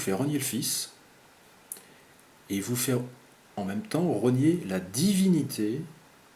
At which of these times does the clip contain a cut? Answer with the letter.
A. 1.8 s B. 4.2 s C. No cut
C